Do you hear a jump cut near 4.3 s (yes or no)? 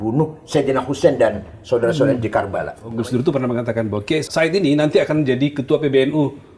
yes